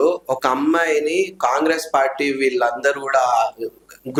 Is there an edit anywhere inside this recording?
no; 0 cuts

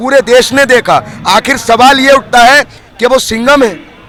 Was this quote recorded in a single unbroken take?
yes; 0 cuts

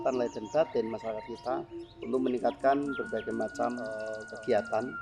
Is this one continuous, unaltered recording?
no; 1 cut; at 4.1 s

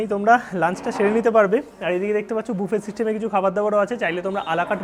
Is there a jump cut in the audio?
no; 0 cuts

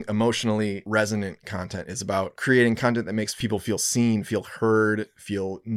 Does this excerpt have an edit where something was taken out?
yes; 2 cuts; at 0.8 s, 2.4 s

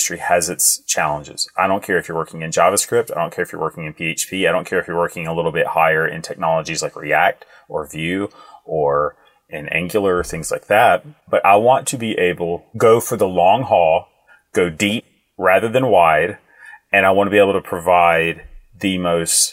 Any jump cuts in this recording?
no; 0 cuts

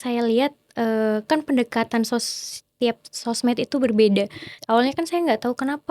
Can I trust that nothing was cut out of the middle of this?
no; 1 cut; at 4.5 s

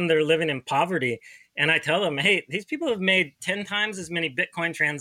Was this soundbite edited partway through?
no; 0 cuts

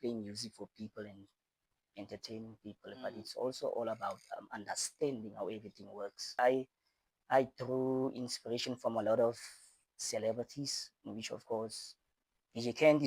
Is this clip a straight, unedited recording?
no; 1 cut; at 6.4 s

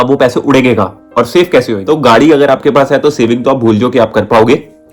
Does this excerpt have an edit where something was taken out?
yes; 1 cut; at 1.8 s

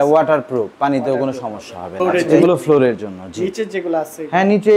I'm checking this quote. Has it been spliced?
yes; 1 cut; at 1.9 s

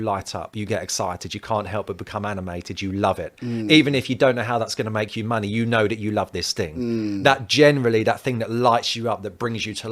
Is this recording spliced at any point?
no; 0 cuts

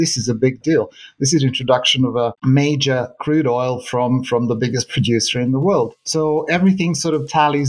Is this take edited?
yes; 1 cut; at 2.4 s

